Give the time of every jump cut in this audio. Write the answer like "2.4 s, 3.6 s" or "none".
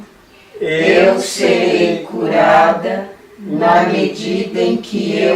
none